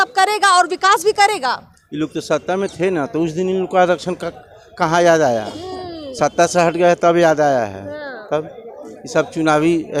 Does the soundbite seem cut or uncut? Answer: uncut